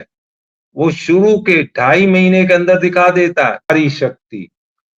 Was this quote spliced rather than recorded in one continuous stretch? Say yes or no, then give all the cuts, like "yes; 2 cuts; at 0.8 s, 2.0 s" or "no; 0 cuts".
yes; 1 cut; at 3.7 s